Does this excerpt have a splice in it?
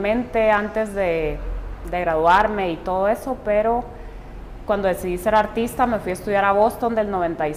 no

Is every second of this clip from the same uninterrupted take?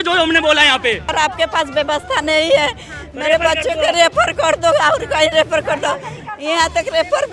no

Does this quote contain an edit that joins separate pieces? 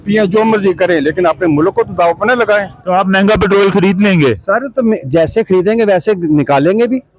yes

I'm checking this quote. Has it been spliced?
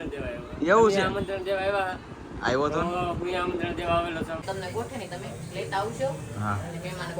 yes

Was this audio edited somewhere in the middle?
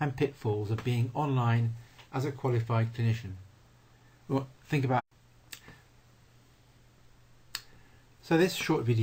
no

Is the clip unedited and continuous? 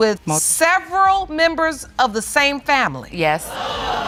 yes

